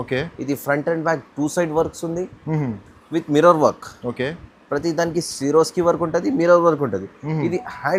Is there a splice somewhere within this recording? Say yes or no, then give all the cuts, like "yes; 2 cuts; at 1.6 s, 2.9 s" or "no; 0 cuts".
no; 0 cuts